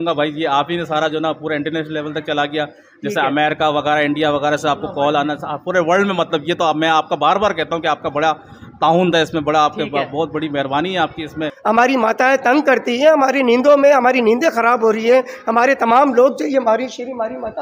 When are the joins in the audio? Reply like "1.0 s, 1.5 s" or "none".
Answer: 11.5 s